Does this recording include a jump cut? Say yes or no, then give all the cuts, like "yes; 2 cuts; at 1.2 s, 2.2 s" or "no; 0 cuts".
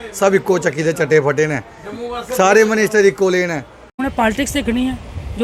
yes; 1 cut; at 3.9 s